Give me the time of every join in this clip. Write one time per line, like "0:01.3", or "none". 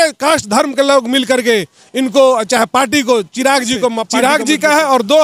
0:04.1